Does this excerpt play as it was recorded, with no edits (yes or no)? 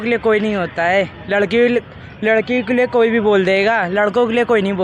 yes